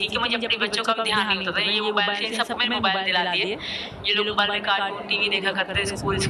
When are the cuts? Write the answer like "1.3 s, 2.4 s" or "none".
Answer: none